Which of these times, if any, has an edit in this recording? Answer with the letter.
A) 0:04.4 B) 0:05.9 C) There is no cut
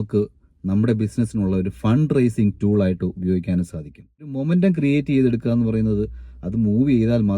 A